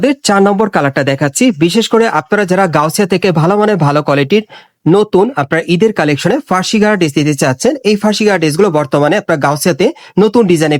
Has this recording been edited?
no; 0 cuts

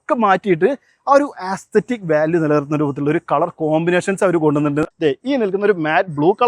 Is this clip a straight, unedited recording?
no; 1 cut; at 4.8 s

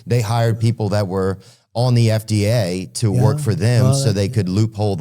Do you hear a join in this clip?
no; 0 cuts

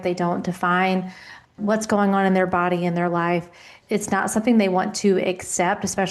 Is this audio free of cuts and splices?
no; 2 cuts; at 1.6 s, 3.7 s

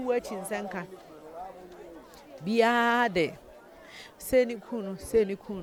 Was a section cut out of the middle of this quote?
no; 0 cuts

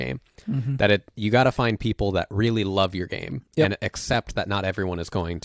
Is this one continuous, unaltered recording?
yes; 0 cuts

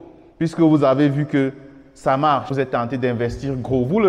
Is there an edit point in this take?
yes; 1 cut; at 2.5 s

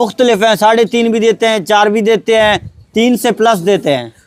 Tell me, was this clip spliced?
no; 0 cuts

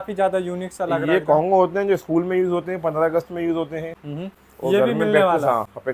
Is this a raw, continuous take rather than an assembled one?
yes; 0 cuts

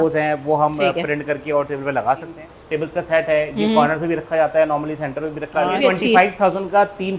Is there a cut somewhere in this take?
yes; 2 cuts; at 2.3 s, 5.8 s

